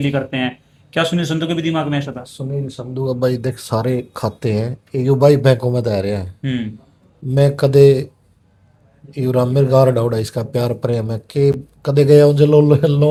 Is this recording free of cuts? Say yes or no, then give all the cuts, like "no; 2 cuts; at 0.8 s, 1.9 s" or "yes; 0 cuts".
yes; 0 cuts